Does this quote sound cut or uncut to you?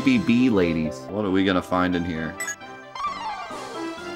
cut